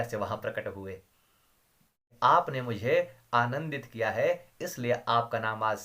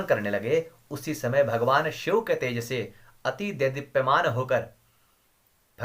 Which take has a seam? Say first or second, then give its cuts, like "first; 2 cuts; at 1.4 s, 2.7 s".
first; 1 cut; at 2.0 s